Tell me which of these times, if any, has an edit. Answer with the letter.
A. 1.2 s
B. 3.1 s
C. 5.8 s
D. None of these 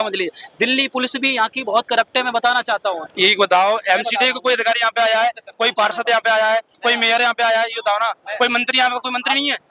B